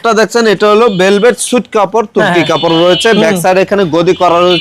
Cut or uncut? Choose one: uncut